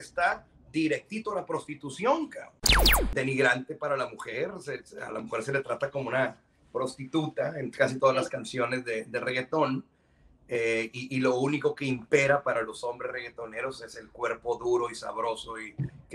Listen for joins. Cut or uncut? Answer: cut